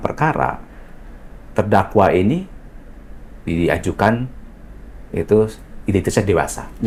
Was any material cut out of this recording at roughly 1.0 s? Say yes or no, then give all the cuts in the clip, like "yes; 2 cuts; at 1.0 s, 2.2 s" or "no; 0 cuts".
no; 0 cuts